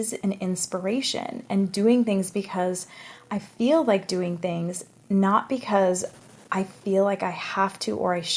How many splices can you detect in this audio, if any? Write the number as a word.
zero